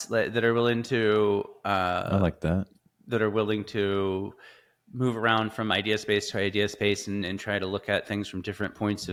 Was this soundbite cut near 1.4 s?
no; 0 cuts

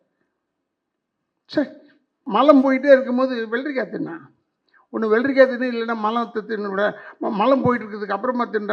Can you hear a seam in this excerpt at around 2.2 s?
yes; 1 cut; at 2.2 s

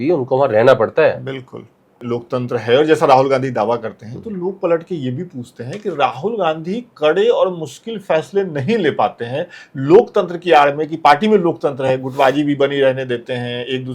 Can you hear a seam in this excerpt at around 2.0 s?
yes; 1 cut; at 2.0 s

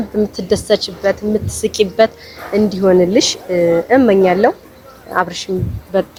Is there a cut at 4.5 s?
no; 0 cuts

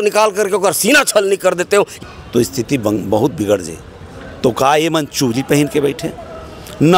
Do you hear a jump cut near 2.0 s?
yes; 1 cut; at 2.0 s

